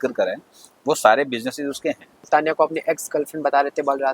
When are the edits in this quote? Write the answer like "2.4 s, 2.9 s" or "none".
2.3 s